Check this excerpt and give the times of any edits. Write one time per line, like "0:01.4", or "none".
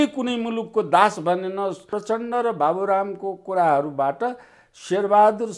0:01.9